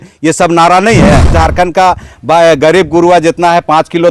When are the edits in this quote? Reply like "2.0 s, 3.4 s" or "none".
1.3 s